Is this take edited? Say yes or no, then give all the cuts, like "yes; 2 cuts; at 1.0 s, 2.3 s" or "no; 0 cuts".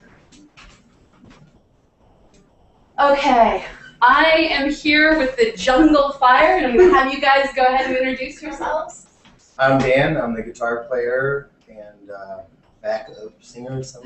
yes; 1 cut; at 8.6 s